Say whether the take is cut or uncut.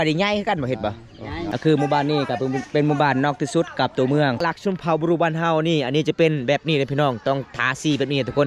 cut